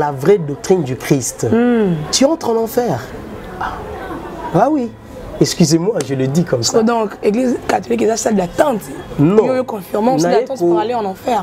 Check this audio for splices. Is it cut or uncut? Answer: uncut